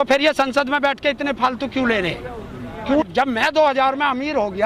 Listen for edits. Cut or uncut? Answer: cut